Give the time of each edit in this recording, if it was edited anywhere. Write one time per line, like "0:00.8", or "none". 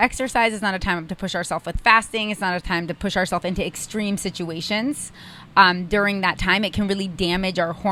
none